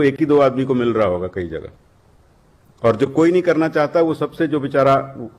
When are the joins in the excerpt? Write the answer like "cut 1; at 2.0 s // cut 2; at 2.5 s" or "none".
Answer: none